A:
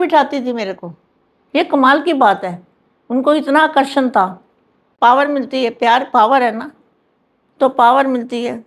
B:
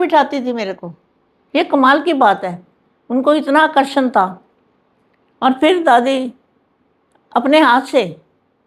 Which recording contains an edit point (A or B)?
A